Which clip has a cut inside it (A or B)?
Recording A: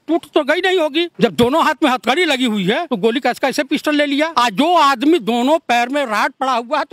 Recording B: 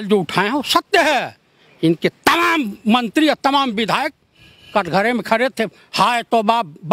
A